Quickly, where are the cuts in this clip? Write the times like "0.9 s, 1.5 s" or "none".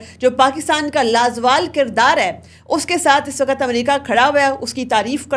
none